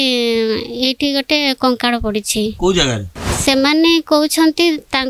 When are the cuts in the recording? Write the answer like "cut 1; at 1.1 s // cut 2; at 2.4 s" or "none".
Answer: cut 1; at 3.4 s